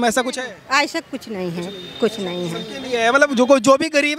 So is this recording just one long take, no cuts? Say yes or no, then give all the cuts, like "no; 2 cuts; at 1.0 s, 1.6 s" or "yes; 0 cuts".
yes; 0 cuts